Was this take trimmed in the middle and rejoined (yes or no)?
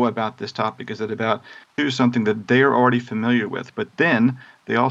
yes